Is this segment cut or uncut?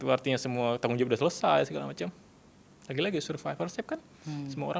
uncut